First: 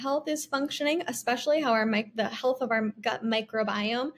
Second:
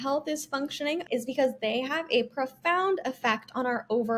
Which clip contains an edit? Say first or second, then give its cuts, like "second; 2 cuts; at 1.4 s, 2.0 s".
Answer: second; 1 cut; at 1.0 s